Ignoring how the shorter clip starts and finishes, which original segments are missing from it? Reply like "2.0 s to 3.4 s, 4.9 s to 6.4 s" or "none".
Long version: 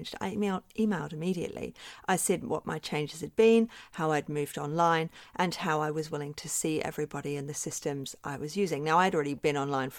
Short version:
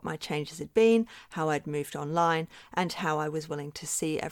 none